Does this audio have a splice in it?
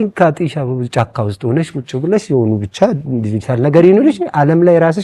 no; 0 cuts

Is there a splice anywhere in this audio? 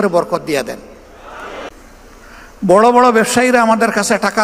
yes; 1 cut; at 1.7 s

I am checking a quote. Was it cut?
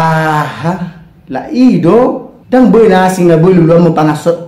yes; 1 cut; at 2.3 s

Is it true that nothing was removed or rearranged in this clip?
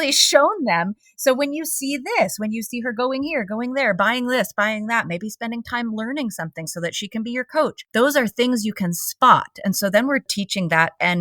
no; 2 cuts; at 7.8 s, 10.3 s

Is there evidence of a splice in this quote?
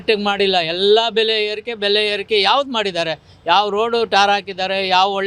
no; 0 cuts

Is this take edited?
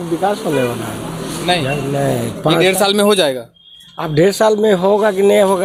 no; 0 cuts

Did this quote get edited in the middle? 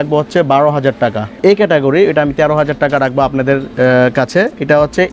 yes; 1 cut; at 1.4 s

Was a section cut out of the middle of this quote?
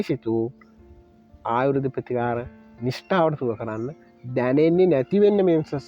no; 0 cuts

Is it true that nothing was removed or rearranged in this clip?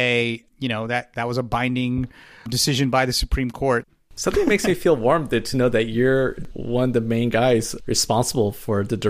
no; 2 cuts; at 3.9 s, 6.4 s

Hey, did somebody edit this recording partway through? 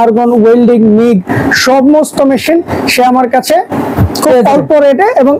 no; 0 cuts

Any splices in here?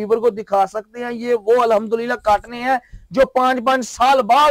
no; 0 cuts

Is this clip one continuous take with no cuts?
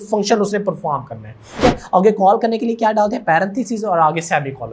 no; 1 cut; at 1.6 s

